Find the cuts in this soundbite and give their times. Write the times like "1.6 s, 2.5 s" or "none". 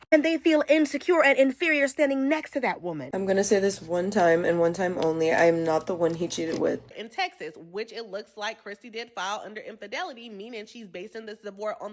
3.2 s, 6.8 s